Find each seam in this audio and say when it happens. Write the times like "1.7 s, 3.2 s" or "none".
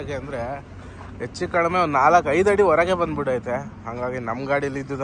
none

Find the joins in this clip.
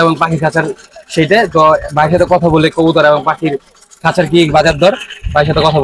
none

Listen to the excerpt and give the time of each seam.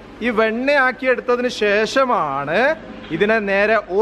none

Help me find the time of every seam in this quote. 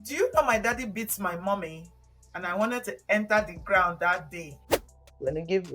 4.7 s

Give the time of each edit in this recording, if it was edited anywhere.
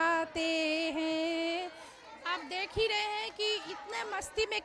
2.1 s

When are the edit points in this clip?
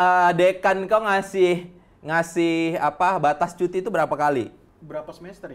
none

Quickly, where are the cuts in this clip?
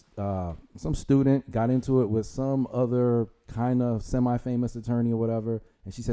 none

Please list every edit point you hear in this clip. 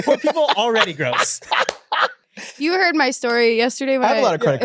2.3 s

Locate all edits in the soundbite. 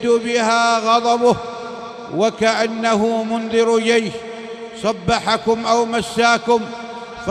none

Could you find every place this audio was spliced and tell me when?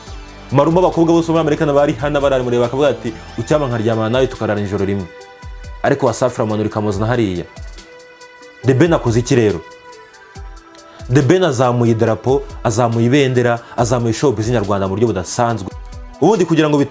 15.6 s

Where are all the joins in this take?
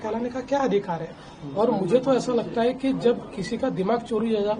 none

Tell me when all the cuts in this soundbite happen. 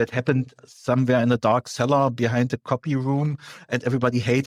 none

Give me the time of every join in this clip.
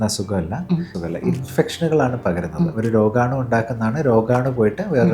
1.0 s

